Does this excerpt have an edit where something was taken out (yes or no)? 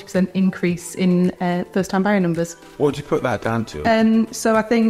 yes